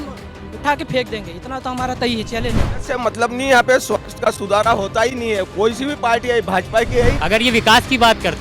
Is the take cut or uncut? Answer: cut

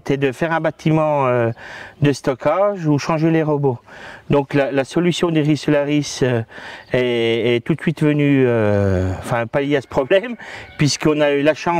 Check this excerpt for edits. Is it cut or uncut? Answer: uncut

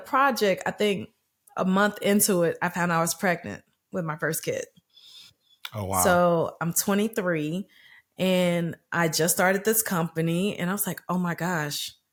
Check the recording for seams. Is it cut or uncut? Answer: uncut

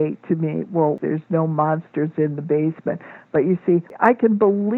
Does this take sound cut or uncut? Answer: cut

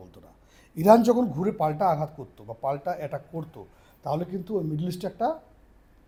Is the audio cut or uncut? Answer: uncut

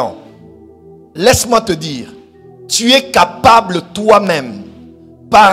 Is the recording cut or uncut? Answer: uncut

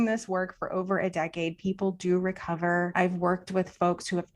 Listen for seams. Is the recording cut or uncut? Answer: cut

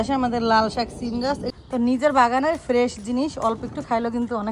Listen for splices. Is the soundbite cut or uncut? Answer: cut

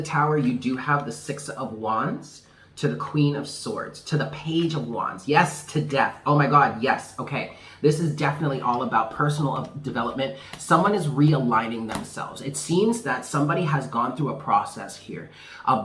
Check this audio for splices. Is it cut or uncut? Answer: uncut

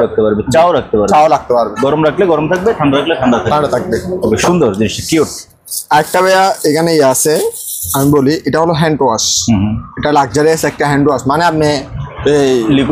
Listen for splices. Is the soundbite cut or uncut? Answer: uncut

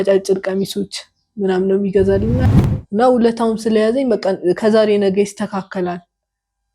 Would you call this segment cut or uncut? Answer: cut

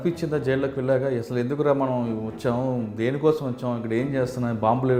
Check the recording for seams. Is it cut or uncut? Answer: uncut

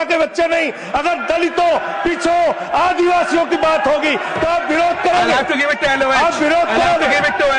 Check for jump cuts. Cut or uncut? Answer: uncut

